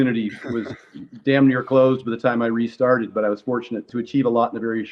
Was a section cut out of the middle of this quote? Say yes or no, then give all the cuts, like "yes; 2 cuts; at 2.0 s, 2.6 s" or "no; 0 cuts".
yes; 1 cut; at 3.9 s